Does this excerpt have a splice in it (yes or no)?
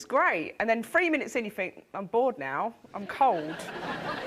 no